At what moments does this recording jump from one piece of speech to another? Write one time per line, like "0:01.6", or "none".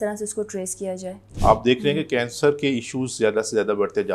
0:01.2